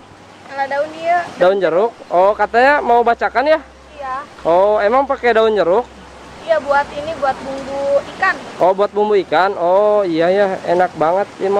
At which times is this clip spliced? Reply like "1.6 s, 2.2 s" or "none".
none